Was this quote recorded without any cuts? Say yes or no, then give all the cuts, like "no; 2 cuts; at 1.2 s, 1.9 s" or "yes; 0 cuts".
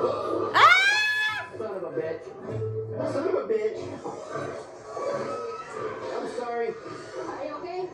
yes; 0 cuts